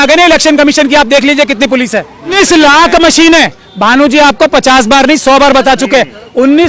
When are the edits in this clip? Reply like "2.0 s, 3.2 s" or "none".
2.3 s